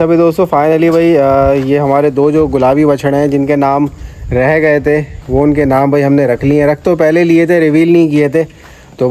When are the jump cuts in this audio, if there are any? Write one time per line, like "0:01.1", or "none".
none